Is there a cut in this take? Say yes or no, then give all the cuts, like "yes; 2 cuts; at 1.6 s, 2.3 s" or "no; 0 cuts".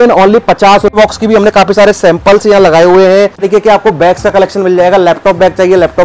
yes; 2 cuts; at 0.9 s, 3.4 s